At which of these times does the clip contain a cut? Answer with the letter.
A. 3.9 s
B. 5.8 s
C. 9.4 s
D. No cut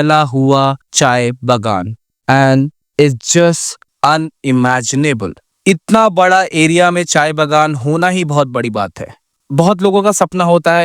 C